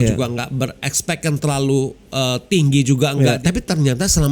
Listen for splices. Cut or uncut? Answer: cut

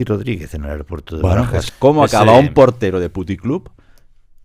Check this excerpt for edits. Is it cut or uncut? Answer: cut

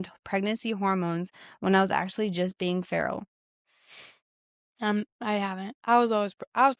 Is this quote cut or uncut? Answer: cut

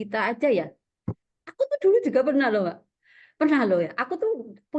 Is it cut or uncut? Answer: uncut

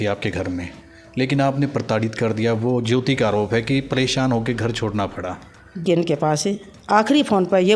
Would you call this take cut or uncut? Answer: cut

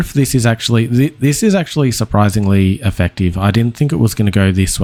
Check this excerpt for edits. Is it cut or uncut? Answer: uncut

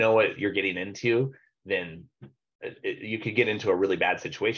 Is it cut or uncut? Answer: uncut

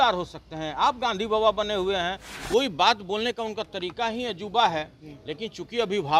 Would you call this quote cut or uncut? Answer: cut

